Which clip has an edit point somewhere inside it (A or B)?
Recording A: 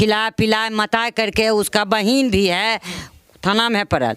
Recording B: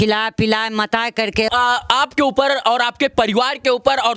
B